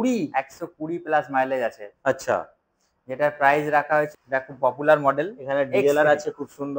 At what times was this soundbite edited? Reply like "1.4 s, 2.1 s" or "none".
4.1 s